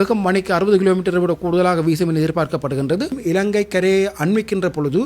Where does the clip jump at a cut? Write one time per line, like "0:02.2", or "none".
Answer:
0:03.2